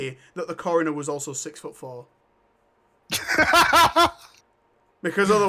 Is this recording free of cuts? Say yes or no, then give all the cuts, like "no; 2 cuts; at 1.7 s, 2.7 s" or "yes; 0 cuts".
yes; 0 cuts